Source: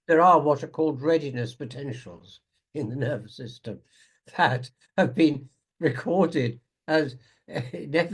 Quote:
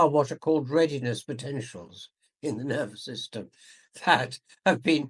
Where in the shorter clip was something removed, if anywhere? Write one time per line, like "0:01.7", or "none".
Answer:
none